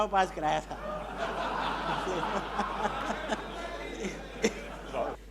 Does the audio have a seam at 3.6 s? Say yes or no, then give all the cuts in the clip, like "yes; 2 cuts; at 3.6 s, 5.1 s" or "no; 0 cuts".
no; 0 cuts